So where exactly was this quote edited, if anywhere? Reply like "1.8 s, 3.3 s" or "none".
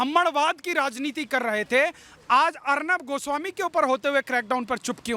none

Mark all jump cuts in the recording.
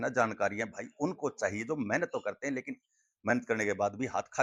none

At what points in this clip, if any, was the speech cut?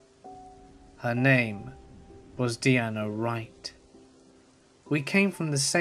0.9 s

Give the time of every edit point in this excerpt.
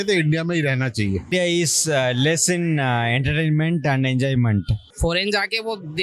1.3 s, 4.8 s

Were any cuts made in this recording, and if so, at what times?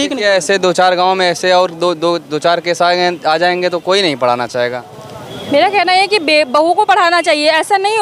none

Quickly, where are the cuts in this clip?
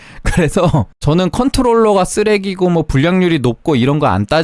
0.9 s

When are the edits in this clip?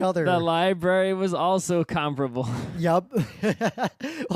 2.1 s

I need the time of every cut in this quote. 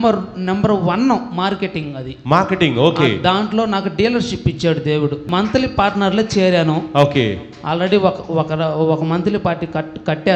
5.2 s

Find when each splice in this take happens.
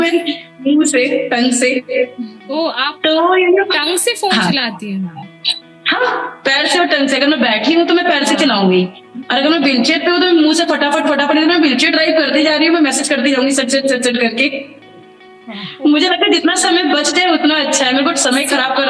none

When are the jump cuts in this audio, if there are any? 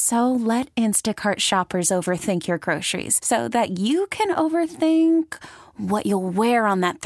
none

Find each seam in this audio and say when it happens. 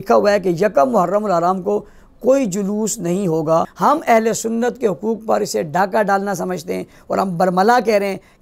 3.7 s

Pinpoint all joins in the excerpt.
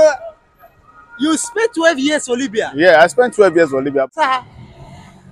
4.1 s

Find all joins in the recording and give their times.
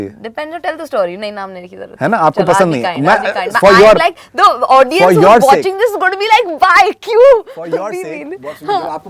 none

